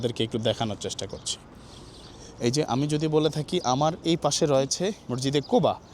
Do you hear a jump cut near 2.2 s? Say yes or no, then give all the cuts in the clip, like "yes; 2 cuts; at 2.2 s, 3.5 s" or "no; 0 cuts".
no; 1 cut; at 5.1 s